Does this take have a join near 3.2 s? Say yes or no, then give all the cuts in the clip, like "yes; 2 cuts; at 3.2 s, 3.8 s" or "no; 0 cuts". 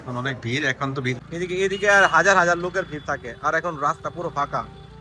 no; 1 cut; at 1.2 s